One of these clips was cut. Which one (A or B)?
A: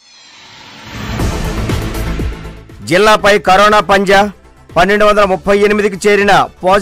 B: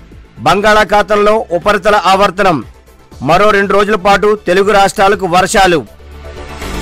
A